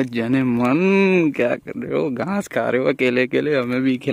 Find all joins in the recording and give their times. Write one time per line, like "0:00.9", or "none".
none